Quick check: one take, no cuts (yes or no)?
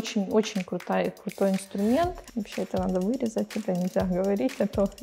no